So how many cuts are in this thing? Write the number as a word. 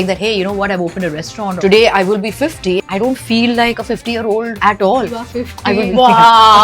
four